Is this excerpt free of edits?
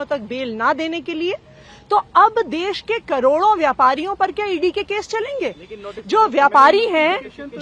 yes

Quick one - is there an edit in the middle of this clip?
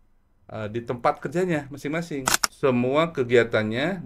yes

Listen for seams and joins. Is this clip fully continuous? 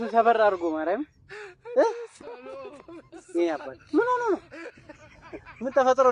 yes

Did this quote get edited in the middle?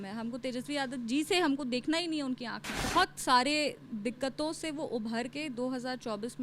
yes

